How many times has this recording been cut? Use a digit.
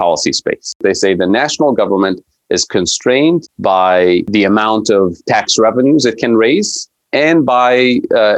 3